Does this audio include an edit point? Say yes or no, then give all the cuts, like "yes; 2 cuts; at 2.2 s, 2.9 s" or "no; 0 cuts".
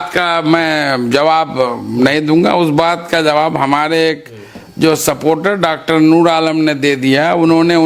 no; 0 cuts